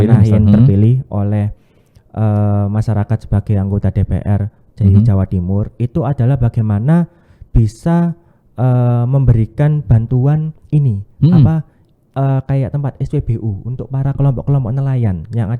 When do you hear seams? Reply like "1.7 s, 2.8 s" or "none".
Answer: none

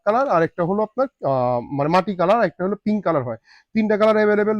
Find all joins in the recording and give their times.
none

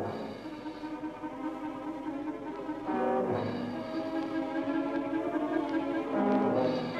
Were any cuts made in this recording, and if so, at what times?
5.0 s

